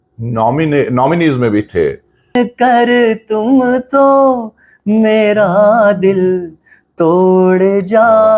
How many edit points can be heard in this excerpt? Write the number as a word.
one